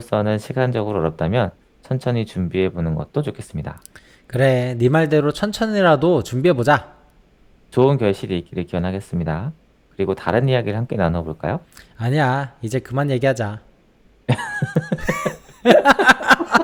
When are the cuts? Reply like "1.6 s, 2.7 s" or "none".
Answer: none